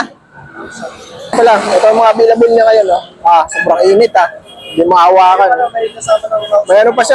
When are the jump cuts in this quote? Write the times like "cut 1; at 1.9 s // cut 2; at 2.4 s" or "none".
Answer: cut 1; at 1.3 s